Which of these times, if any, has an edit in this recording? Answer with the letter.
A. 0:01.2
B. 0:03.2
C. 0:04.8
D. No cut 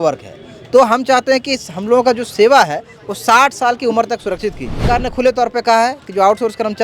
C